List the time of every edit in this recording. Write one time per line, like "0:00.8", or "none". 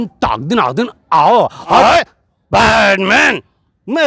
0:01.7